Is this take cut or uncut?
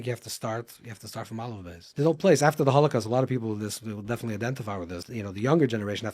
cut